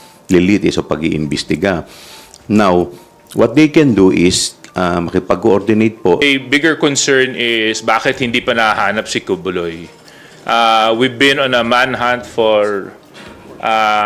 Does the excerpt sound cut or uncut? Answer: cut